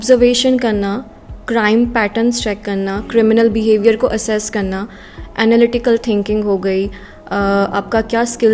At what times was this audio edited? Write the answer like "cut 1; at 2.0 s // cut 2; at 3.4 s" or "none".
none